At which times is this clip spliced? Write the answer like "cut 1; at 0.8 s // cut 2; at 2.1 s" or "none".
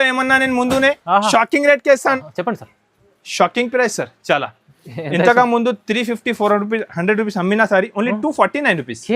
cut 1; at 2.2 s